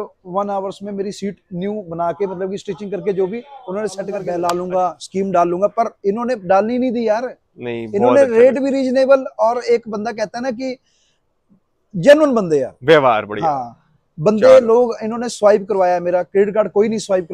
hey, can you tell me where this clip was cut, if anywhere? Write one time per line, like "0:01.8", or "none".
0:04.3